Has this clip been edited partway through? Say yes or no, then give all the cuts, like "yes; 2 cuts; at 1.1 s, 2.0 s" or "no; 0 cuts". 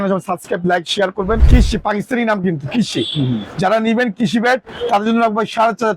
yes; 1 cut; at 1.4 s